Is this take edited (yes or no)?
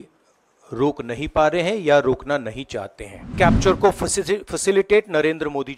yes